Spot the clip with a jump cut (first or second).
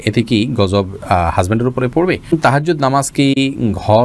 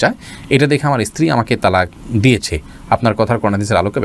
first